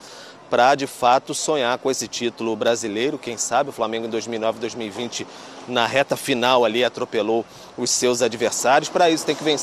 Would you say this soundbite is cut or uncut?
uncut